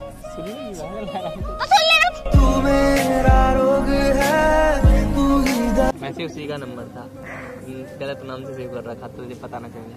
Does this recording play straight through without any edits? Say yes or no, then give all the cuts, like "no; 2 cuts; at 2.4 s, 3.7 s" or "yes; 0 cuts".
no; 1 cut; at 5.9 s